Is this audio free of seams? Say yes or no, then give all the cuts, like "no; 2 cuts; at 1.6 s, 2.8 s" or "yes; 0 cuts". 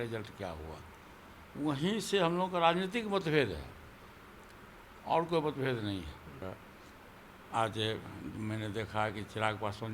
no; 1 cut; at 6.4 s